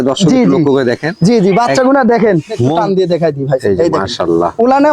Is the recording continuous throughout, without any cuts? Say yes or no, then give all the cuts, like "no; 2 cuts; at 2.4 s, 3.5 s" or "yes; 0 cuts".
no; 1 cut; at 2.8 s